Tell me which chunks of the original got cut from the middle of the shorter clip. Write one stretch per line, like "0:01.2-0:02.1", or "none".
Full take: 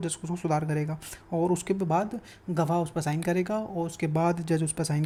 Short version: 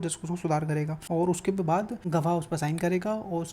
0:01.0-0:01.2
0:02.2-0:02.4